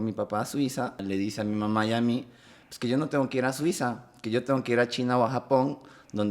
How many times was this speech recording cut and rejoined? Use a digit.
1